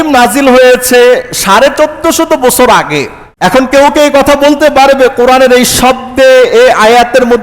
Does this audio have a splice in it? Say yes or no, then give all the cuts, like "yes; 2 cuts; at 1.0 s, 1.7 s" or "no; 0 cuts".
yes; 1 cut; at 3.2 s